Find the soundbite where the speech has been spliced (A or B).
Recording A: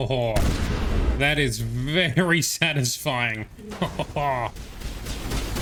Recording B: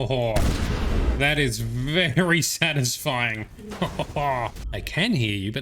B